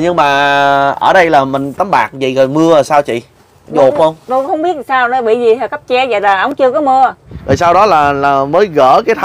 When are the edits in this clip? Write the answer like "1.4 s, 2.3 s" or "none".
7.3 s